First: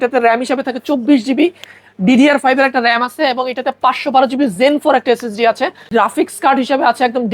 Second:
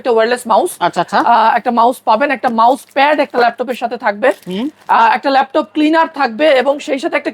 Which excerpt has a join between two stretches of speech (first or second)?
first